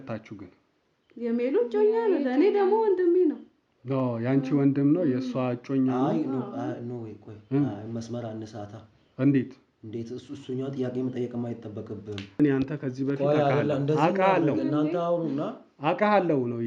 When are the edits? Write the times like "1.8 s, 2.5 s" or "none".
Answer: 12.4 s

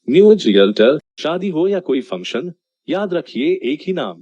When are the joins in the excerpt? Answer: 1.1 s

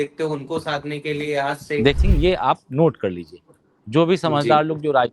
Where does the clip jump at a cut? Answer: 2.0 s

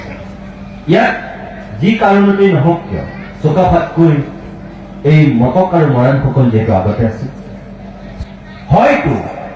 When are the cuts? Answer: 8.2 s

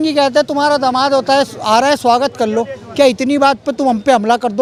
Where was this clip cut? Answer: none

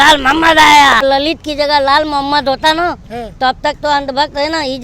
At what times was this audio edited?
1.0 s

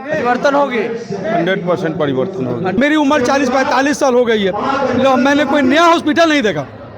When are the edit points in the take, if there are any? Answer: 2.7 s

